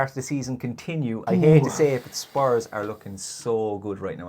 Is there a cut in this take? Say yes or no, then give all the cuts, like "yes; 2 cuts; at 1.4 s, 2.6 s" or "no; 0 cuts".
yes; 1 cut; at 1.2 s